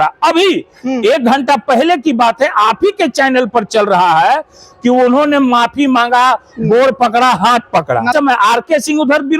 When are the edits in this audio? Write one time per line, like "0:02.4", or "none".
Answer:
0:08.1